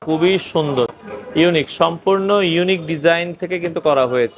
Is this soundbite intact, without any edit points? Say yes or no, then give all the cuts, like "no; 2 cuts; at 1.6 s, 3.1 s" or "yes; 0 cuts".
yes; 0 cuts